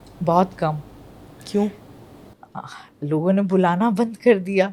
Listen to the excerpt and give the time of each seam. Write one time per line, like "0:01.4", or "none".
none

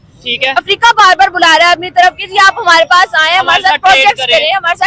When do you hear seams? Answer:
none

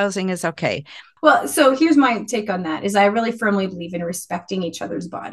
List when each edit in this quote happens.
0:01.0

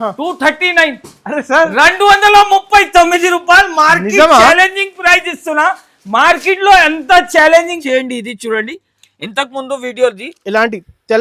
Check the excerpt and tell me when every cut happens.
0:07.8

